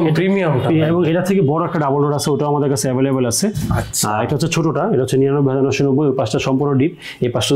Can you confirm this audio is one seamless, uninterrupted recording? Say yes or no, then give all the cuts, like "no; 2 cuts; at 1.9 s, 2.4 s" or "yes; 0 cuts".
yes; 0 cuts